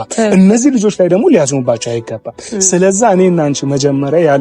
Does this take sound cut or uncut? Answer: uncut